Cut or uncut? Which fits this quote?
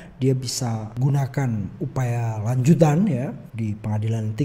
cut